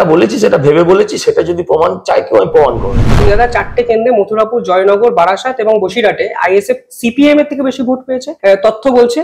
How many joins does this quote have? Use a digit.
2